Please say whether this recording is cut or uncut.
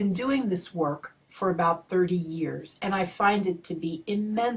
cut